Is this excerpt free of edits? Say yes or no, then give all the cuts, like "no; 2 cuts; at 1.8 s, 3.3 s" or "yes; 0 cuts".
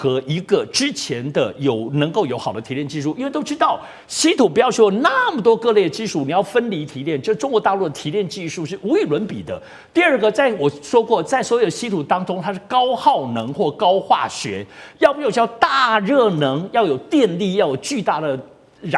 yes; 0 cuts